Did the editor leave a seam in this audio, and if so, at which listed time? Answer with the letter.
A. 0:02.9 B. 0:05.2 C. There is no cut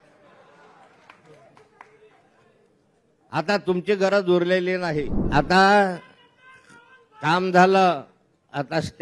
B